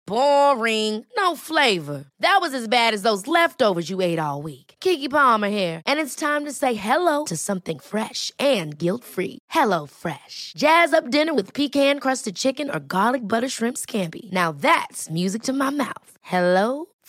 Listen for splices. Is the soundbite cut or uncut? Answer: uncut